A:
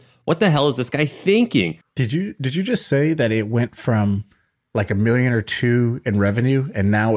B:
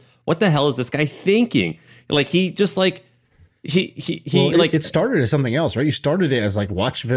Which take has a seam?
A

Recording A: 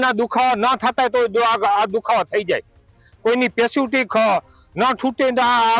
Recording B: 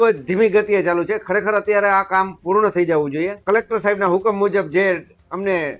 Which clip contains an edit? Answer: B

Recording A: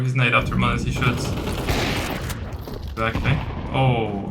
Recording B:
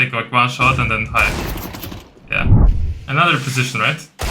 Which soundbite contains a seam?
B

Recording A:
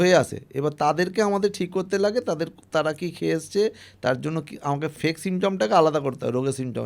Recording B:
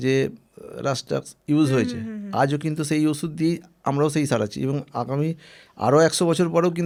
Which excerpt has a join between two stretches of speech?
A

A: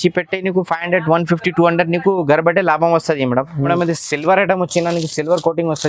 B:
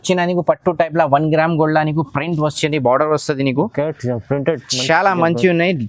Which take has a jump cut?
A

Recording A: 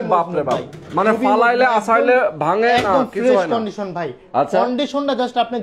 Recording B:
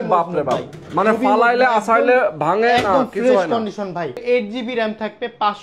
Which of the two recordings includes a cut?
B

